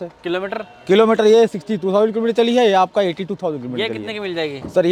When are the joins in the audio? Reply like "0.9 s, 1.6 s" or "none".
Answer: none